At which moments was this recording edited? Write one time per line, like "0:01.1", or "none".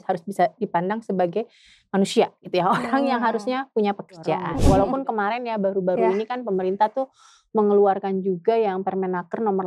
0:04.5